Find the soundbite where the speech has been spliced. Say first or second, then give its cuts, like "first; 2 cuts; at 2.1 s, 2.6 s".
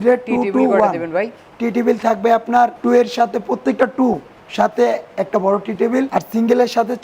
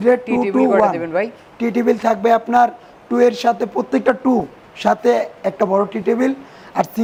first; 2 cuts; at 2.8 s, 6.1 s